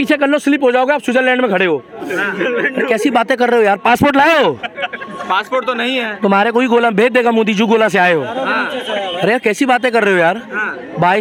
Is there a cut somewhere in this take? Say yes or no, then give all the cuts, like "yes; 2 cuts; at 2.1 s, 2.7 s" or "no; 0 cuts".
no; 0 cuts